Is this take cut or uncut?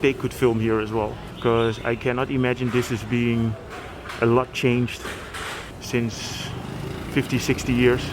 cut